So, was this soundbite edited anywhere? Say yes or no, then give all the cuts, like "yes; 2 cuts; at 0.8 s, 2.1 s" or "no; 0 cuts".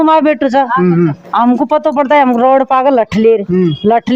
no; 0 cuts